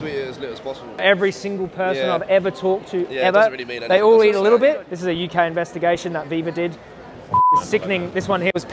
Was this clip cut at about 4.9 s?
yes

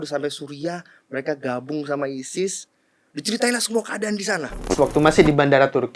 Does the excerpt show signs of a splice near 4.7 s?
yes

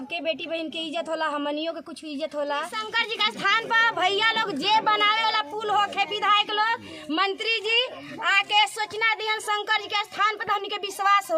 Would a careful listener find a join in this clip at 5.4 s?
no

